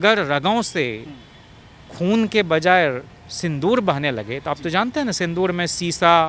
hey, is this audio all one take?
yes; 0 cuts

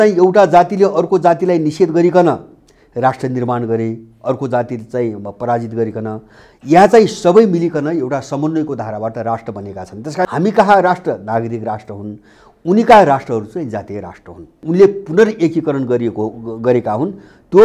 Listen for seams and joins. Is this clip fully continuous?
no; 2 cuts; at 10.3 s, 14.5 s

